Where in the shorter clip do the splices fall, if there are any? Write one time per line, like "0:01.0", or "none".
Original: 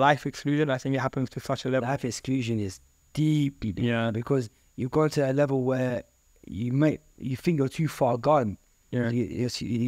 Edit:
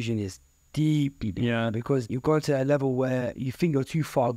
0:02.1
0:03.4